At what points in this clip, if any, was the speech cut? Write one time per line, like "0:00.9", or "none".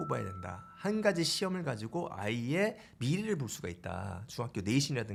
none